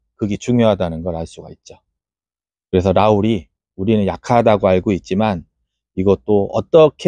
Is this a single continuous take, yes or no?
yes